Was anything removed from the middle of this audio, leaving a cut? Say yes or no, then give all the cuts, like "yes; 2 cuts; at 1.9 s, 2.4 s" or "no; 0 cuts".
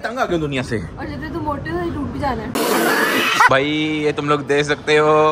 yes; 1 cut; at 3.5 s